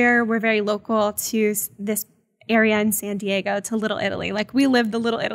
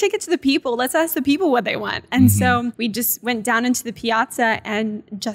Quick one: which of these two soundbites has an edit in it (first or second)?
second